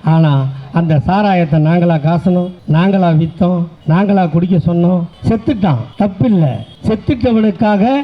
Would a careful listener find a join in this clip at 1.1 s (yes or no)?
no